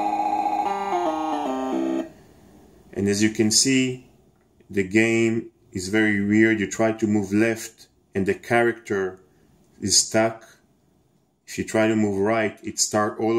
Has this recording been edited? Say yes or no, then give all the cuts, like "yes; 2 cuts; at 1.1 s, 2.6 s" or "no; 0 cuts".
yes; 1 cut; at 9.8 s